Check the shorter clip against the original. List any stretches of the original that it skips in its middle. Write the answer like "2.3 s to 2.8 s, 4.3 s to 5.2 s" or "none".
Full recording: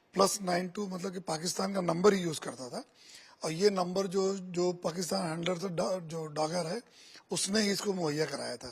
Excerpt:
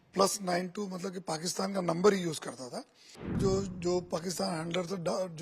3.4 s to 4.1 s